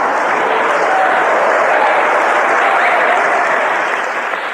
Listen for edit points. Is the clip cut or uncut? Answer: uncut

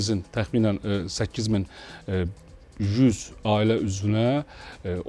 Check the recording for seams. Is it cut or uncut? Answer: uncut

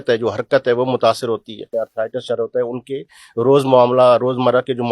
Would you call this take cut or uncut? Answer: cut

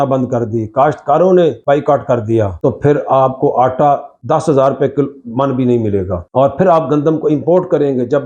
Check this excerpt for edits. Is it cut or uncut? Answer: uncut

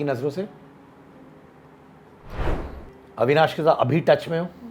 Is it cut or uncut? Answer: cut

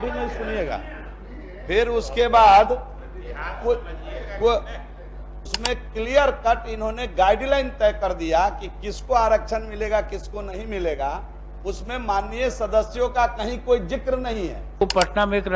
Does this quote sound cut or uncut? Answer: cut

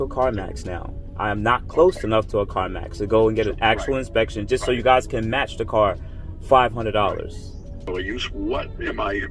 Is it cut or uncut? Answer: cut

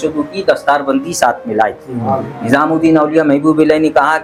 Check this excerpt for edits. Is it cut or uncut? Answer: uncut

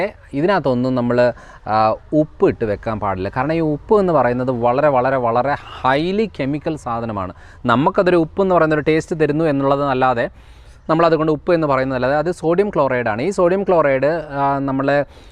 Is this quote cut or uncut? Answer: uncut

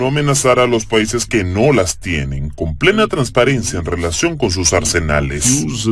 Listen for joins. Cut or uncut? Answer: uncut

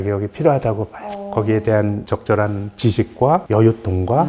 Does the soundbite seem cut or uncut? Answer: uncut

